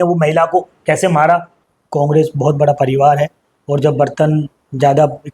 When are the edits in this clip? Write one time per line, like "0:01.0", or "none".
0:01.5